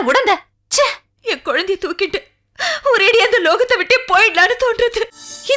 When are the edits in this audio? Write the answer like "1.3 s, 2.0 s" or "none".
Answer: 1.1 s